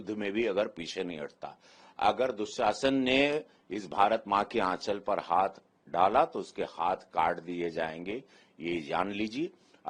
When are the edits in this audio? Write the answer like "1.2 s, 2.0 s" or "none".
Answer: none